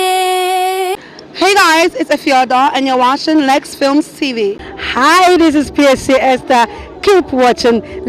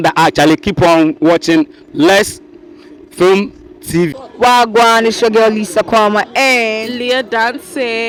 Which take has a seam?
first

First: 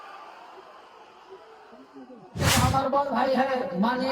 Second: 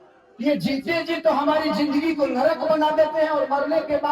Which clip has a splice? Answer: first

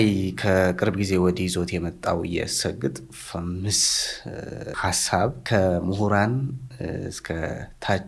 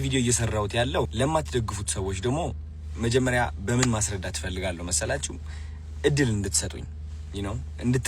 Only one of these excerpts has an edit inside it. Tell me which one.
second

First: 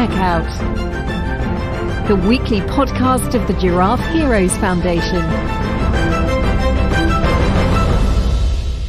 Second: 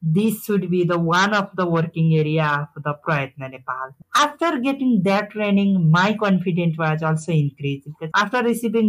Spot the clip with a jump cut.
second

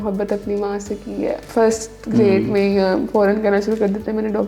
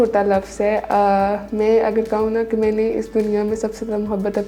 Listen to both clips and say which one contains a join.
first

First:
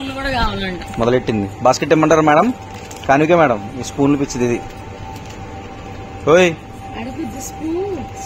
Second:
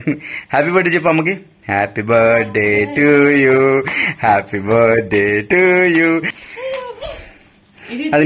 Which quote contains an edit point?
second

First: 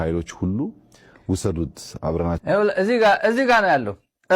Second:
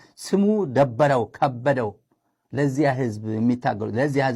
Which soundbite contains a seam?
first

